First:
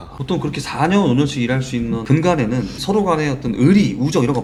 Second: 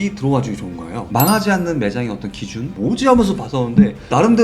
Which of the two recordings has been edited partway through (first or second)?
second